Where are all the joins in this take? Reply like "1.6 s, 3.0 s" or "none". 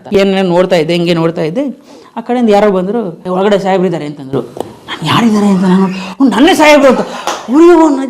3.2 s